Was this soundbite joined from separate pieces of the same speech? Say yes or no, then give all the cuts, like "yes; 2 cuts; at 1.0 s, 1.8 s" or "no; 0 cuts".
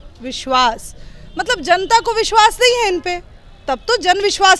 no; 0 cuts